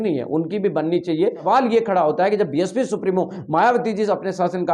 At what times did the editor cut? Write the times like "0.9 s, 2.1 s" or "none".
1.4 s